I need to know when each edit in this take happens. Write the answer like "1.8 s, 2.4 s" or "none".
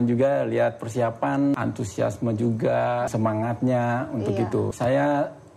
1.5 s, 3.1 s, 4.7 s